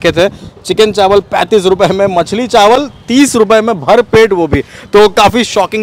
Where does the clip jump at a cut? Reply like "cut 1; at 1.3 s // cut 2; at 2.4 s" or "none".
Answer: none